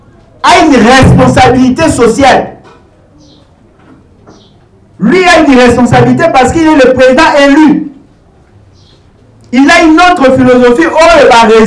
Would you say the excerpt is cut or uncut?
uncut